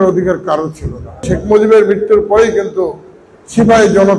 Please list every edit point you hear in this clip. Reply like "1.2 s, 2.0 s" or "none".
1.2 s